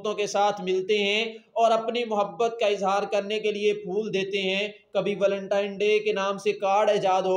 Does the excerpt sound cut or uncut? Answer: uncut